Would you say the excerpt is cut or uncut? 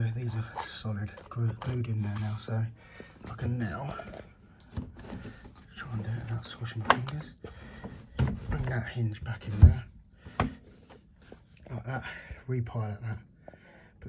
uncut